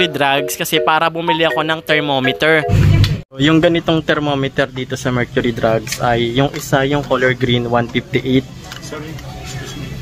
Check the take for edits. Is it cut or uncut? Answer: cut